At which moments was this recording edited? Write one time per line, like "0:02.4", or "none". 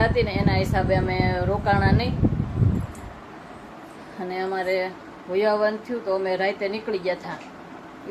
none